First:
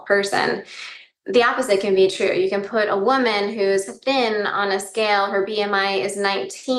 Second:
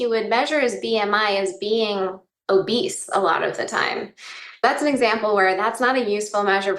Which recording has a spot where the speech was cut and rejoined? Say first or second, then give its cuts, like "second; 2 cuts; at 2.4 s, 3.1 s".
second; 1 cut; at 4.6 s